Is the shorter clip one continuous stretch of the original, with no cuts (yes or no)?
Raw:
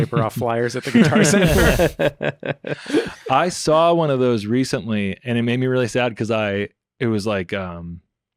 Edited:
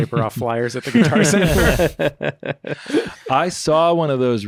yes